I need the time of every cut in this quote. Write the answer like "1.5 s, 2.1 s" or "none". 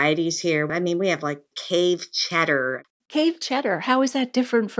2.8 s